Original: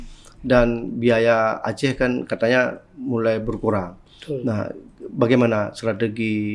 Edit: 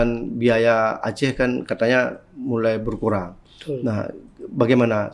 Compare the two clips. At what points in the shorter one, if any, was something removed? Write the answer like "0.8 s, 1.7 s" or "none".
none